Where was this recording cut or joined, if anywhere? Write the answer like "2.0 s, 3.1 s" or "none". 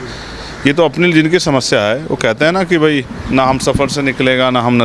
3.1 s